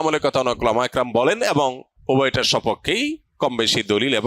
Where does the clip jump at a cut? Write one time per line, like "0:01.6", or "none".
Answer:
0:01.9